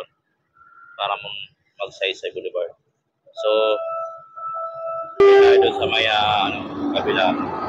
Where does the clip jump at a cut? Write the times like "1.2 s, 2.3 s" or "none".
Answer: 5.2 s